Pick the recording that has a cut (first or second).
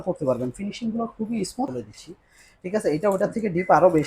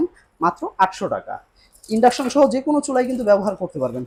first